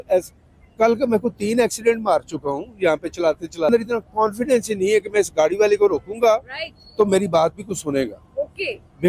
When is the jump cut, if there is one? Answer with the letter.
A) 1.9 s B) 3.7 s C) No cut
B